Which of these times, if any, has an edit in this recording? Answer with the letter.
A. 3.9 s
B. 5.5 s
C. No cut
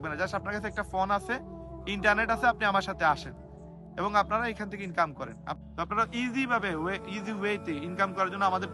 B